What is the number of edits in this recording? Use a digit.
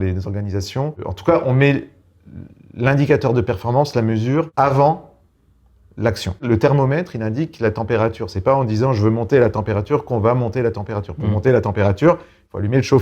2